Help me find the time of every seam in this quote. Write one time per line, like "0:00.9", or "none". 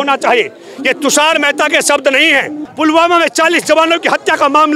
0:02.6